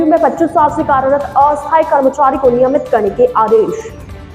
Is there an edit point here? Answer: no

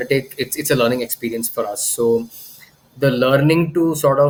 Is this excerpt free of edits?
yes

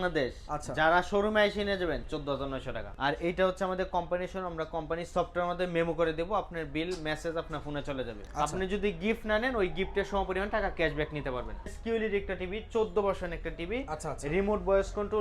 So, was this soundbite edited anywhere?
yes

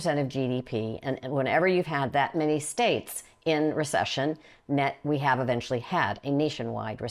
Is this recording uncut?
yes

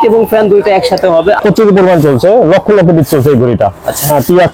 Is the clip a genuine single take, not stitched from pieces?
no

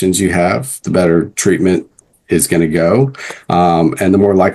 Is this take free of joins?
yes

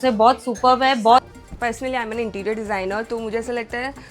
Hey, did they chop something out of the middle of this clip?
yes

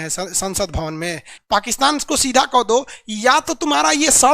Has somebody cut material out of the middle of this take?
yes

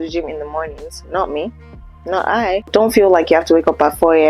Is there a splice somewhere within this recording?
yes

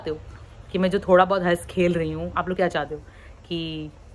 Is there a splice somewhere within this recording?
no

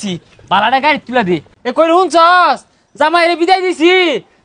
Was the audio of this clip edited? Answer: yes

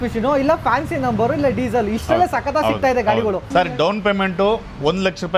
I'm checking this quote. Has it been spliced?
yes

